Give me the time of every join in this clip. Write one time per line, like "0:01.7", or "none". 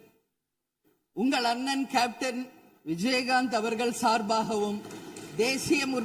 none